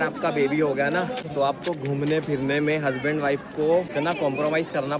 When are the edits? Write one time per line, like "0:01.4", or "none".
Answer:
0:01.2
0:03.9